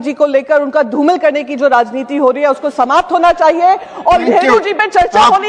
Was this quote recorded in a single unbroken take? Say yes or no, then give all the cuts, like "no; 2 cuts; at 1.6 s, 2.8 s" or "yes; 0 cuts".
no; 1 cut; at 4.2 s